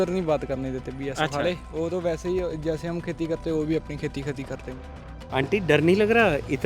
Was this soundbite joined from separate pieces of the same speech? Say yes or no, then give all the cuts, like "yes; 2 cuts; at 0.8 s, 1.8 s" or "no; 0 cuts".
yes; 1 cut; at 4.8 s